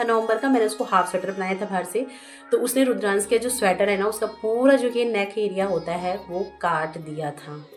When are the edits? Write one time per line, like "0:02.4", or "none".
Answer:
none